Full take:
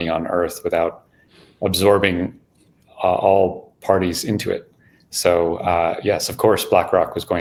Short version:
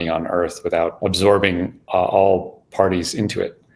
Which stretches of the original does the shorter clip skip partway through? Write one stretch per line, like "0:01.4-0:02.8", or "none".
0:00.9-0:01.6
0:02.4-0:02.9